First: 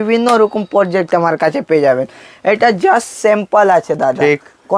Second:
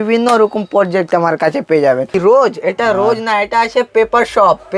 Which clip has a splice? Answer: second; 1 cut; at 2.2 s

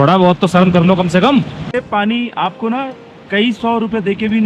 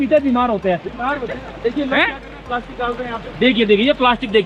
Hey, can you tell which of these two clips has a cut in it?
first; 1 cut; at 1.7 s

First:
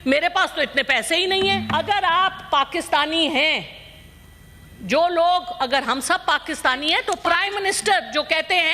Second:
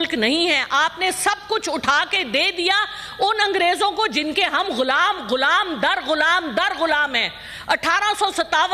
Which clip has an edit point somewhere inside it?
first; 2 cuts; at 1.6 s, 7.2 s

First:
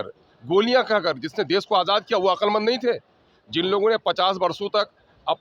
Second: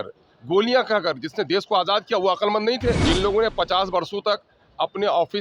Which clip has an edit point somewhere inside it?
second; 1 cut; at 3.0 s

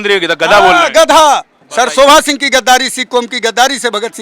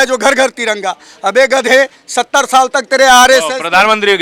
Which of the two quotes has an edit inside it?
first; 1 cut; at 1.6 s

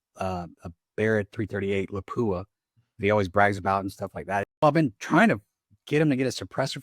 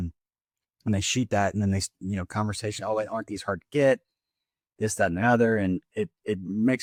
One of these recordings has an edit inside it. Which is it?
first; 1 cut; at 4.5 s

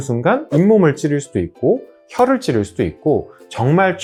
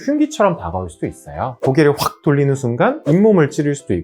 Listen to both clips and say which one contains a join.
second; 1 cut; at 1.6 s

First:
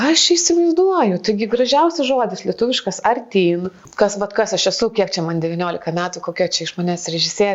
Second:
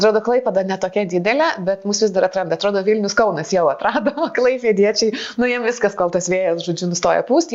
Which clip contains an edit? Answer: first; 1 cut; at 3.8 s

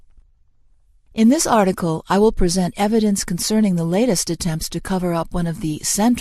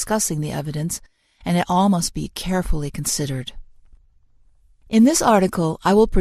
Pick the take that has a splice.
first; 1 cut; at 4.8 s

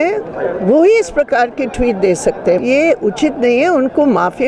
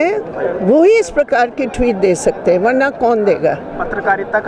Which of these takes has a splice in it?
first; 1 cut; at 2.6 s

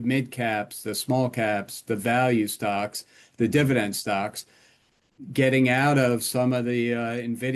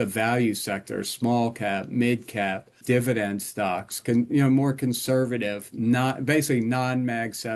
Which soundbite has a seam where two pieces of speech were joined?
second; 1 cut; at 2.8 s

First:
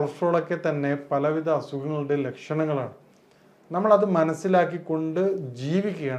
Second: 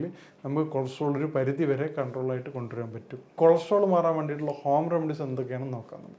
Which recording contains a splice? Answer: second; 1 cut; at 3.3 s

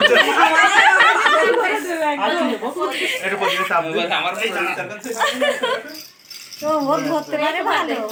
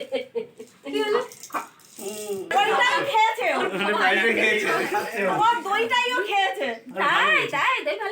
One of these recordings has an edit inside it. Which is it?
second; 1 cut; at 2.5 s

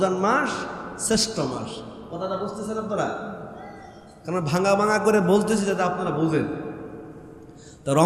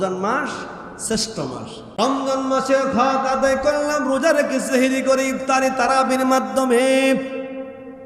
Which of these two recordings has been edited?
second; 1 cut; at 1.8 s

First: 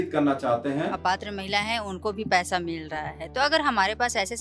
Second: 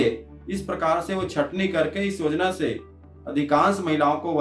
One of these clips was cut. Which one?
first; 1 cut; at 0.9 s

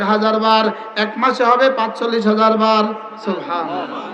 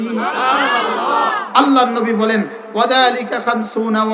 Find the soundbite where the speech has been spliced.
second; 1 cut; at 1.3 s

